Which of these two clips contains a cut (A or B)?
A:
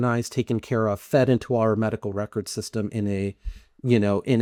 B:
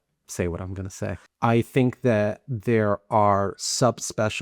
B